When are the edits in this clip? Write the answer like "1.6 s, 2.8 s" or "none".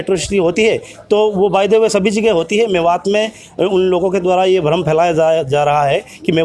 none